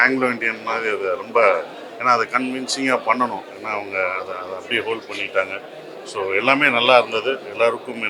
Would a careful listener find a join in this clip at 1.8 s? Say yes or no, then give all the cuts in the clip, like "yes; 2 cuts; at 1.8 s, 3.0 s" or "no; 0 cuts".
no; 0 cuts